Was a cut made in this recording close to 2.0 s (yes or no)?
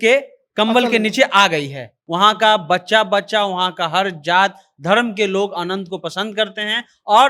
yes